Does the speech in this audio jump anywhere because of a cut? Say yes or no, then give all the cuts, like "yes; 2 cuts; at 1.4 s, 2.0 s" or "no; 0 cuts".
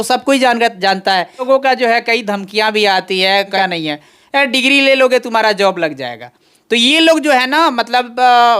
yes; 2 cuts; at 1.5 s, 3.5 s